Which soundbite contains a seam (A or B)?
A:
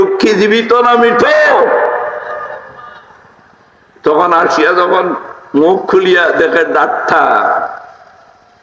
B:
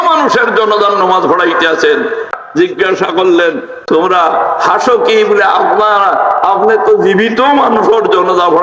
B